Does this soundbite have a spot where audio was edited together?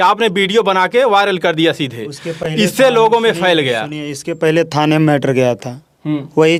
no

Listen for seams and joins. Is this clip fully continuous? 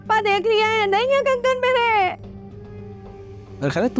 yes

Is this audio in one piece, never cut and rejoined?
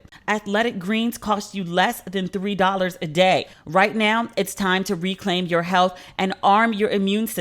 no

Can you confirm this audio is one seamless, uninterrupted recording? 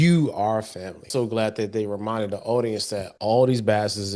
no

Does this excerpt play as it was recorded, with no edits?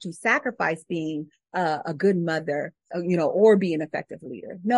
no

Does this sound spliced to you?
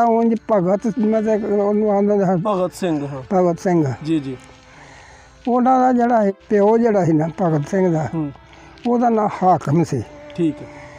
yes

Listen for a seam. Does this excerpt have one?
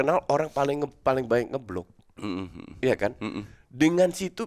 no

